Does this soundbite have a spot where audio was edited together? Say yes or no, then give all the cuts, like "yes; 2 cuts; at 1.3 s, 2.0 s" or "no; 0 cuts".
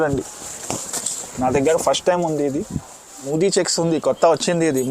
yes; 1 cut; at 3.3 s